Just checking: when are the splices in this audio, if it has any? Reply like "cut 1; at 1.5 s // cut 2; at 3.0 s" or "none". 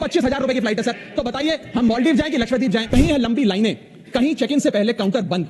cut 1; at 2.9 s

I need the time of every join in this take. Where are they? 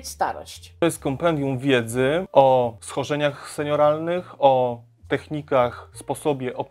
cut 1; at 0.8 s // cut 2; at 2.3 s // cut 3; at 2.8 s

